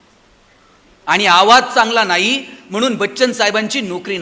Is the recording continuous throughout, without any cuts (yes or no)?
yes